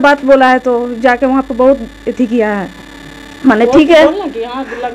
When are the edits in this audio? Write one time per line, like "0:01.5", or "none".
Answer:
none